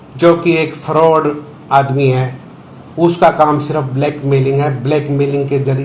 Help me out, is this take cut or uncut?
uncut